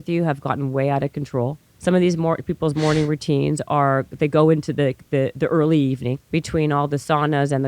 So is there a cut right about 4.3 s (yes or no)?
no